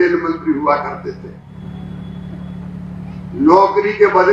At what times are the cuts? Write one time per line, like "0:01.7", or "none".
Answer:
0:01.5